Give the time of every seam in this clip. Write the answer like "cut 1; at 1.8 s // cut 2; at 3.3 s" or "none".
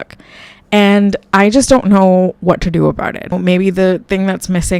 cut 1; at 3.4 s